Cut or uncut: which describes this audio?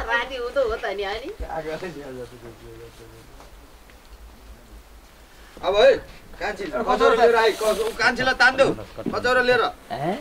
cut